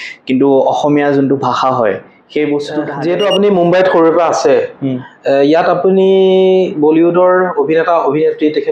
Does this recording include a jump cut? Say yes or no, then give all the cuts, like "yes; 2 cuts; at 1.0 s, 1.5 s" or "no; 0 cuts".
yes; 1 cut; at 2.9 s